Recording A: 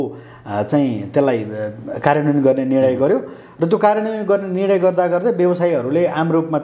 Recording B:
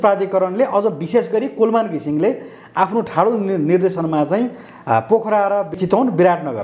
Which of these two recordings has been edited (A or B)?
B